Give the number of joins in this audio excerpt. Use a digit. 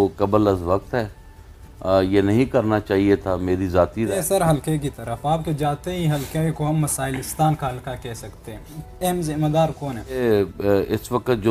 3